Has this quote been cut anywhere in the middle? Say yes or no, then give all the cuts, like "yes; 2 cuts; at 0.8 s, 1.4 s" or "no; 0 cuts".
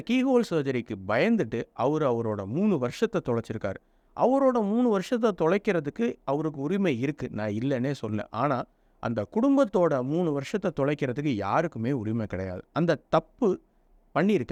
no; 0 cuts